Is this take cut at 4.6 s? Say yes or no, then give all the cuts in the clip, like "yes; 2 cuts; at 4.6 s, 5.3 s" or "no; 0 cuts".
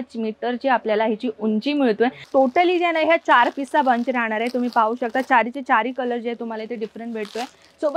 no; 1 cut; at 2.2 s